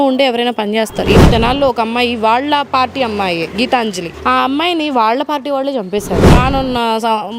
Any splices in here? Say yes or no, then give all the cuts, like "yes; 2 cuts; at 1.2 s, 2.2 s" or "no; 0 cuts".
yes; 2 cuts; at 1.3 s, 6.3 s